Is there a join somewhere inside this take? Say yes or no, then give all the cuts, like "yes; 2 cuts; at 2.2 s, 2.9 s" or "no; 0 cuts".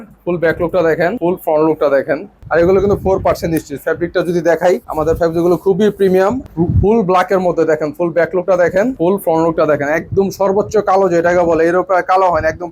yes; 5 cuts; at 1.2 s, 2.3 s, 4.9 s, 6.5 s, 9.0 s